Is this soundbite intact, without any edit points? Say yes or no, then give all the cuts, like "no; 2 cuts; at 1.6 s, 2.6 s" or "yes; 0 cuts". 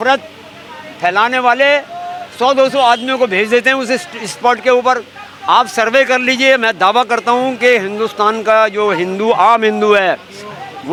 yes; 0 cuts